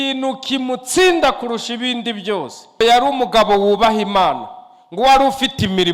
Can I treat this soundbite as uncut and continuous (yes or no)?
no